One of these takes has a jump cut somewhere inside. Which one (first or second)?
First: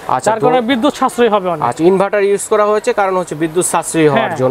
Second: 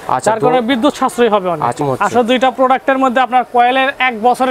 second